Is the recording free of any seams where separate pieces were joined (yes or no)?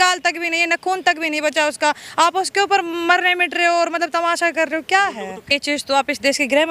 no